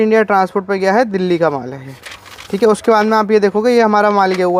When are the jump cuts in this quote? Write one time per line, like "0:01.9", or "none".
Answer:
none